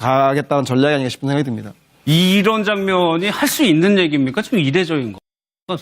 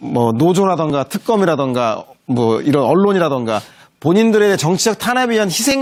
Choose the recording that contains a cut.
first; 1 cut; at 1.6 s

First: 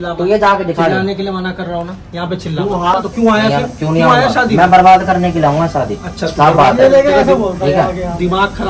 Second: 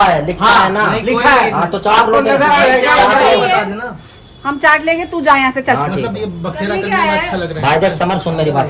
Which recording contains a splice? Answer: first; 1 cut; at 3.0 s

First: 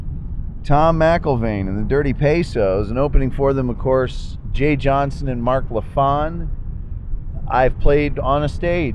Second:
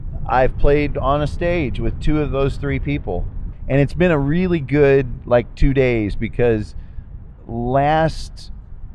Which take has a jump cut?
second; 1 cut; at 3.5 s

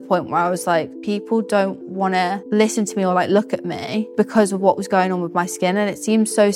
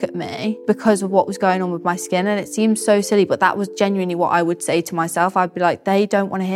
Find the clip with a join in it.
first; 2 cuts; at 0.9 s, 2.4 s

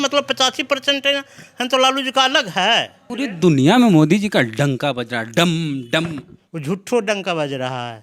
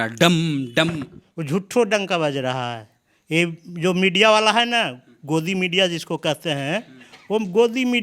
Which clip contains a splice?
first; 1 cut; at 3.0 s

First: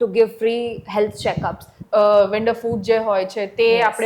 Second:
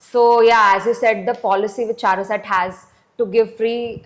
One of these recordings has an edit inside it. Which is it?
first; 1 cut; at 1.8 s

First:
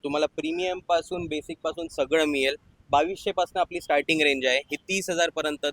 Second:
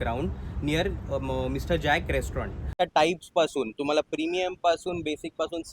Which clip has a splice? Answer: second; 1 cut; at 2.8 s

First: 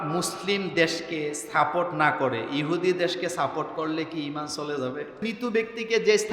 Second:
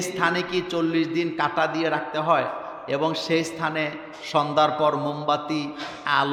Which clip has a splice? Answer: first; 1 cut; at 5.3 s

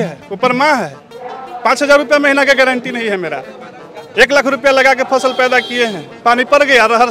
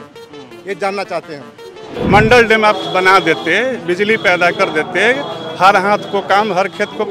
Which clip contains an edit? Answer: second; 1 cut; at 1.9 s

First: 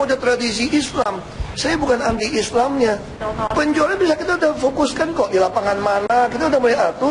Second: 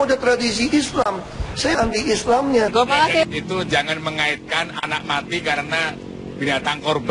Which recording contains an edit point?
second; 2 cuts; at 1.7 s, 2.7 s

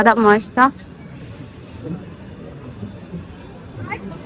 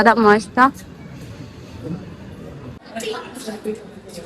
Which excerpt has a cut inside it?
second; 1 cut; at 2.8 s

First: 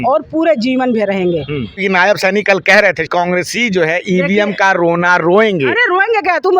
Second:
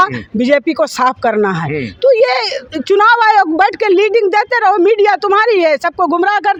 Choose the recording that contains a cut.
first; 2 cuts; at 1.8 s, 3.1 s

